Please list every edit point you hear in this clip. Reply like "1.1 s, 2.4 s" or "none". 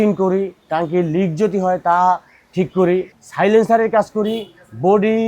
3.2 s